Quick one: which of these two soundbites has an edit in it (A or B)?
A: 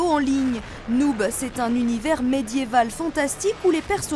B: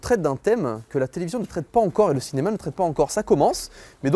A